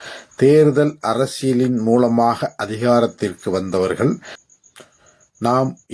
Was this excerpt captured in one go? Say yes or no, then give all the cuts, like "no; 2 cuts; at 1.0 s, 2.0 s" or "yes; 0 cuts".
no; 1 cut; at 4.3 s